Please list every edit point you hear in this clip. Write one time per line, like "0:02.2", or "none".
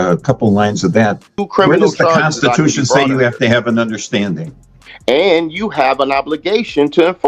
0:01.3
0:04.9